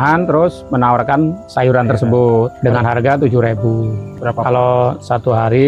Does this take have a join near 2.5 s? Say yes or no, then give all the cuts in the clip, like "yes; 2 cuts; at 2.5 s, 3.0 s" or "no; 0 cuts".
yes; 3 cuts; at 1.4 s, 2.5 s, 4.0 s